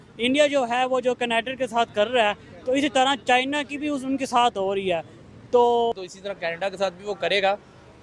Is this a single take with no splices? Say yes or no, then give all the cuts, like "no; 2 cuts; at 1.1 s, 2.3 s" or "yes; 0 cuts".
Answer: yes; 0 cuts